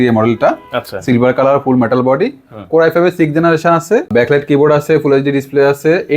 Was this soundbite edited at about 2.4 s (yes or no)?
no